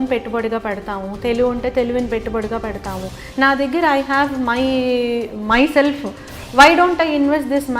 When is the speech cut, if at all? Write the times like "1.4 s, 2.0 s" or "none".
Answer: 3.1 s